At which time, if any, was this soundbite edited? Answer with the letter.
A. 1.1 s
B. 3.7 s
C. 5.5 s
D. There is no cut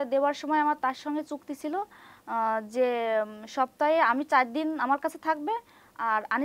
D